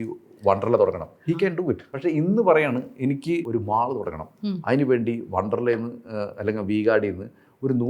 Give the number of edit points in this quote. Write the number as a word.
two